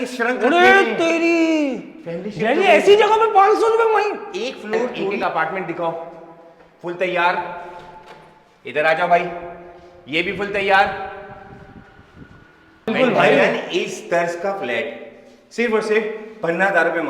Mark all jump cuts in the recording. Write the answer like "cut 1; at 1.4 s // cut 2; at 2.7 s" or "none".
cut 1; at 5.2 s // cut 2; at 12.9 s